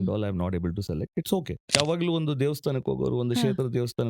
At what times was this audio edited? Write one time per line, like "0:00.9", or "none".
0:01.8